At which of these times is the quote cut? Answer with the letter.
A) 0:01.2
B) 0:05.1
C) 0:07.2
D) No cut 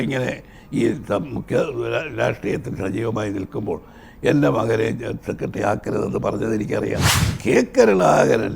C